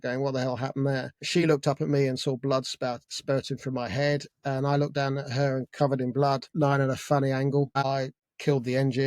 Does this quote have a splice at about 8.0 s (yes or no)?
yes